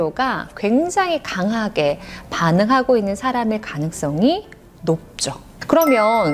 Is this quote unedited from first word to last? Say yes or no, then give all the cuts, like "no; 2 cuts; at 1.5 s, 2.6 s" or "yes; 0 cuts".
yes; 0 cuts